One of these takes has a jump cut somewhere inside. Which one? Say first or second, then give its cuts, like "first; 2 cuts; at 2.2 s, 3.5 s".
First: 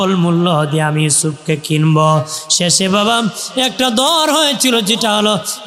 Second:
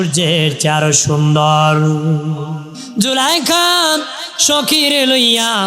second; 1 cut; at 2.8 s